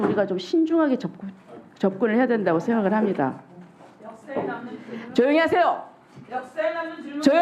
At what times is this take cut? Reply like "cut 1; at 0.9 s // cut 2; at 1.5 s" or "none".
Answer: none

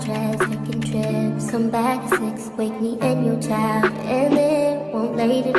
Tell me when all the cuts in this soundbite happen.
none

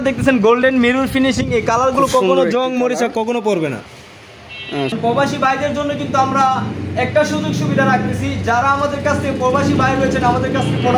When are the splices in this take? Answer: cut 1; at 5.0 s

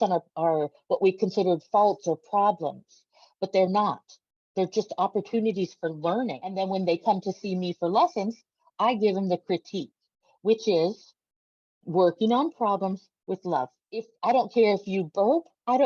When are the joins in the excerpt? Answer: cut 1; at 6.6 s // cut 2; at 14.1 s

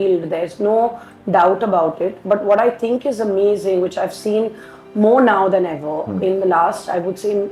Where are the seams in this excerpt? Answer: none

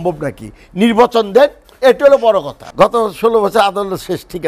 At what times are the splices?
cut 1; at 2.6 s

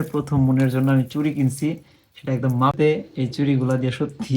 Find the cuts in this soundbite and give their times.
cut 1; at 2.7 s

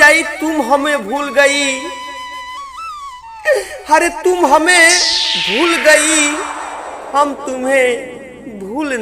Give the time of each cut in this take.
cut 1; at 2.0 s // cut 2; at 3.3 s

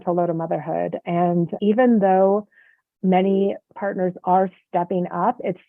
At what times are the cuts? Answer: cut 1; at 3.7 s

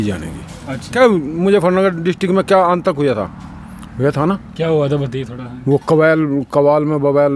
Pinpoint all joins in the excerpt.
cut 1; at 0.9 s

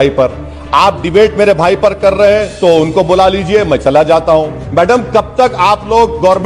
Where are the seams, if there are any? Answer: cut 1; at 4.6 s

